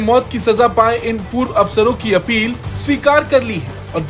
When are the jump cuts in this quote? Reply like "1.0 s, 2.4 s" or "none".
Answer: none